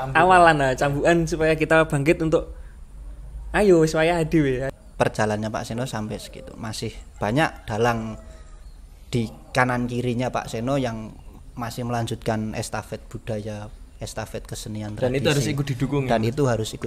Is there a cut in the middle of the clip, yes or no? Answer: yes